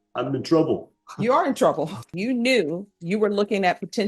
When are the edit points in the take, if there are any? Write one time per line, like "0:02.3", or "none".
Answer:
0:02.2